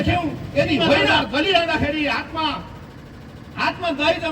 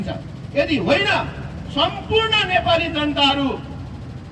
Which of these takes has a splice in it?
first; 1 cut; at 1.0 s

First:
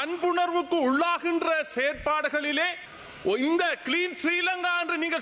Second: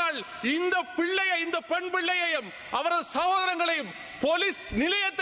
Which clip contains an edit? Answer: first; 1 cut; at 2.9 s

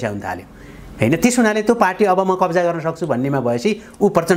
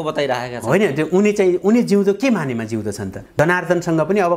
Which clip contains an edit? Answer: second; 1 cut; at 3.2 s

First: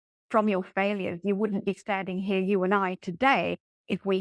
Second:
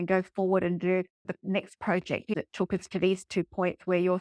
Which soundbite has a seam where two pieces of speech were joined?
second; 2 cuts; at 1.2 s, 2.3 s

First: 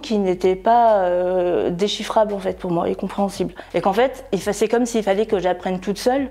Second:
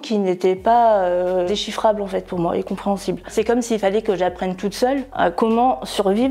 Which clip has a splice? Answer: second; 2 cuts; at 1.5 s, 3.3 s

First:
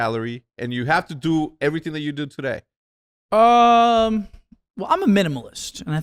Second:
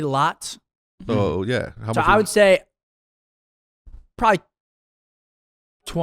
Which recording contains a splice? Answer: second; 1 cut; at 0.9 s

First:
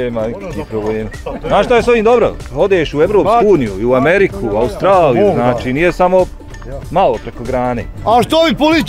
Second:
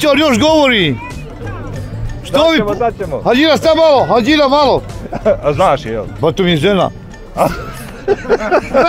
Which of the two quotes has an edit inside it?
first; 2 cuts; at 1.3 s, 7.9 s

